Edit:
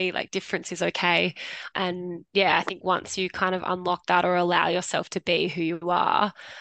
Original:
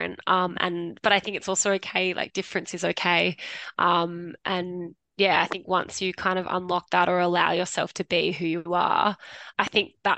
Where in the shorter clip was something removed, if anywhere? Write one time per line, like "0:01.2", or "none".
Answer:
0:01.8